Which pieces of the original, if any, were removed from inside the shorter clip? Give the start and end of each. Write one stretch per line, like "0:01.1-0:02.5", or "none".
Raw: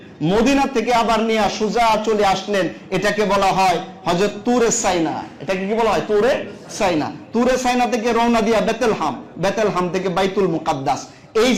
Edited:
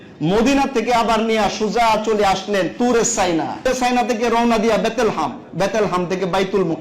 0:02.7-0:04.4
0:05.3-0:07.5